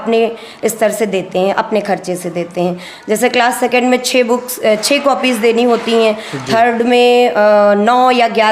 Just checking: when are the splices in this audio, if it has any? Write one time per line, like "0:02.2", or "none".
none